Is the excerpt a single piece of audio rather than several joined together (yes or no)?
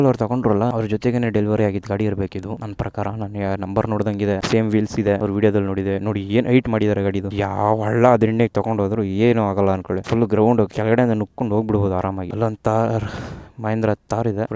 yes